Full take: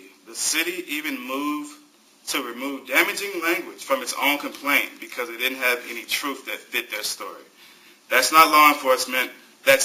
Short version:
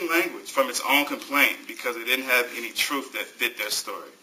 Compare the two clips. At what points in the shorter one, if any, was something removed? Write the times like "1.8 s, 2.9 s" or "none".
none